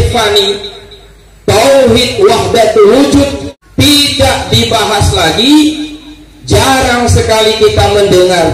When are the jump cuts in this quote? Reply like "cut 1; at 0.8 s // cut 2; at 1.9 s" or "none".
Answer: cut 1; at 3.5 s